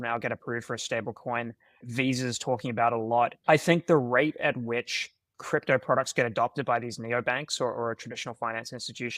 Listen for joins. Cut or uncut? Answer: cut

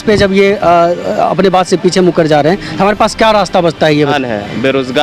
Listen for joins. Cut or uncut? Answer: cut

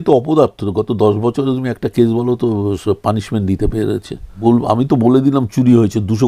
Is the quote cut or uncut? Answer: cut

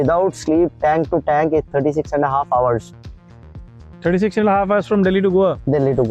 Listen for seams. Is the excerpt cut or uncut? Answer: uncut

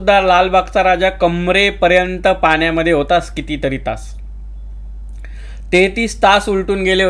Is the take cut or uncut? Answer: uncut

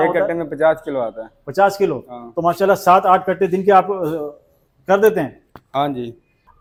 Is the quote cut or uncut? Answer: uncut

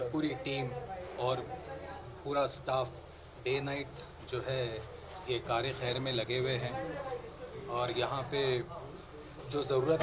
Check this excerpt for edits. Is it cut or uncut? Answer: uncut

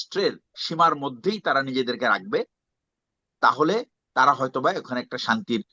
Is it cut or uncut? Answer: uncut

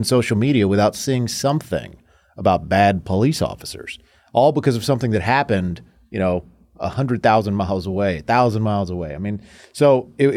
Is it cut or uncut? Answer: uncut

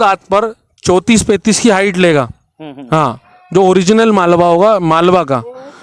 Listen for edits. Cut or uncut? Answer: uncut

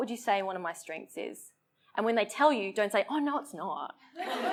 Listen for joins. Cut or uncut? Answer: uncut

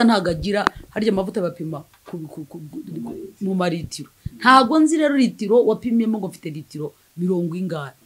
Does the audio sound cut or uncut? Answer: uncut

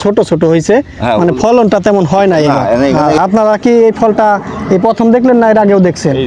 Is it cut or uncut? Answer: cut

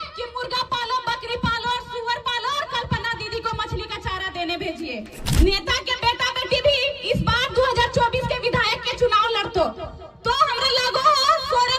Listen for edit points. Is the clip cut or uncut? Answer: cut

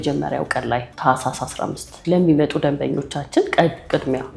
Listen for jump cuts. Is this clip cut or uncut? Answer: uncut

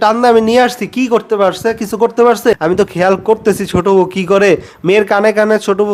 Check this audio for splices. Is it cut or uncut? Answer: cut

